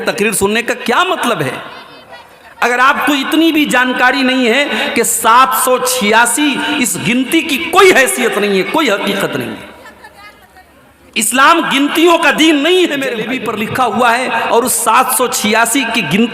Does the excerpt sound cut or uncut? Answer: cut